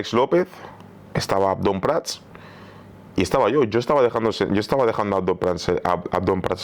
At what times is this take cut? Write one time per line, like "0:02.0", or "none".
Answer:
none